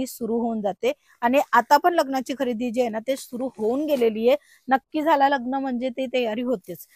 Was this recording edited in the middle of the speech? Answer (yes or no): no